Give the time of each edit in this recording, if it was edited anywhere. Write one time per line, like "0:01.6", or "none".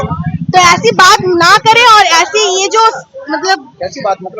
none